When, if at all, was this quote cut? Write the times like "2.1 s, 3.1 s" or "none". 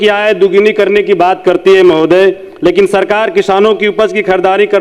none

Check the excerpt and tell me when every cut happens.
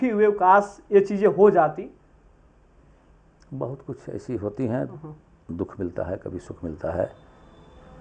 none

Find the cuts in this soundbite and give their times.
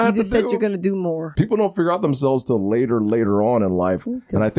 1.3 s

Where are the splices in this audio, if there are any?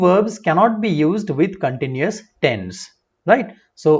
none

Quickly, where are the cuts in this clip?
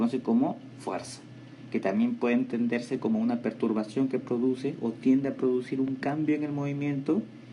3.9 s

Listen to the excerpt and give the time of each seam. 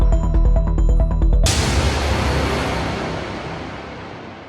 1.4 s

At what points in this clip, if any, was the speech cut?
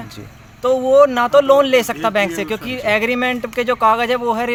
none

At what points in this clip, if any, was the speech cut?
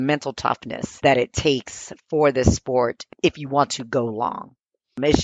1.0 s

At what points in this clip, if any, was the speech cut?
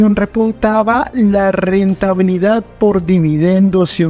none

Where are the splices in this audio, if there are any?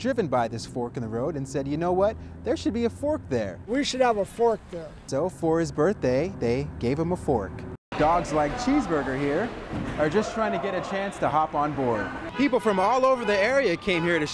7.9 s, 12.2 s

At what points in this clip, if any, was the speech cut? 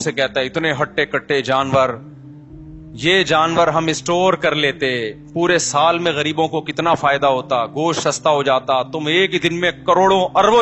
none

